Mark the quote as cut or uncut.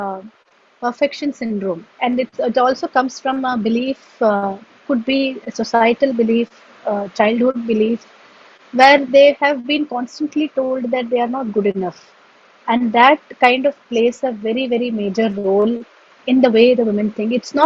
cut